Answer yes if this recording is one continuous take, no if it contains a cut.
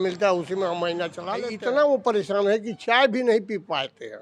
no